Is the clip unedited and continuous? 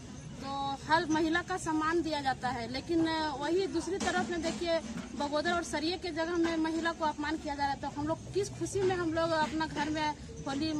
yes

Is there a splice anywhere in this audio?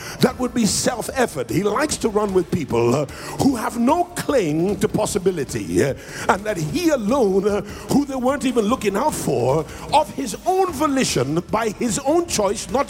no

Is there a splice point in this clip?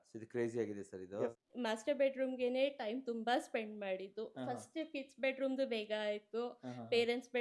yes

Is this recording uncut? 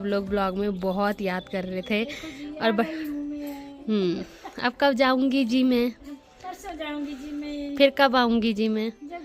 yes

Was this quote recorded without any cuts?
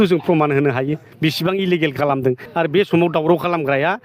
no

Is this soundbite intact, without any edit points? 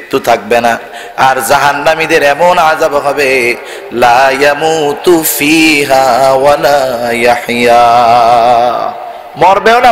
yes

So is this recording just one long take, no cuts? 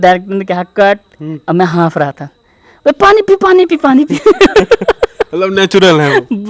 yes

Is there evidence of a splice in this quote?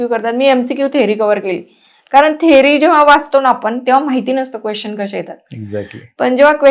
no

